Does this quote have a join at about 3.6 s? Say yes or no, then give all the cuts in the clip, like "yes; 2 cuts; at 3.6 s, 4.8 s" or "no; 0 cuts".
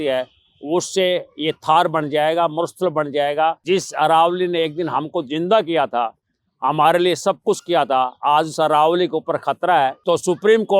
yes; 2 cuts; at 3.6 s, 10.0 s